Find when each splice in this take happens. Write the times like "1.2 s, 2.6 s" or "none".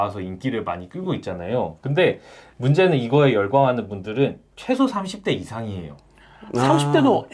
none